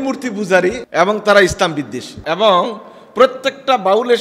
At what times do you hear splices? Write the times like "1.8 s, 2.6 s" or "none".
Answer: 0.8 s, 2.1 s